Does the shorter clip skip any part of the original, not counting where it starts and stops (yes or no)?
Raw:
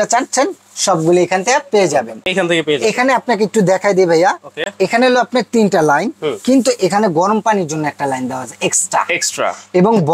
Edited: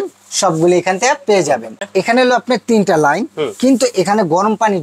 yes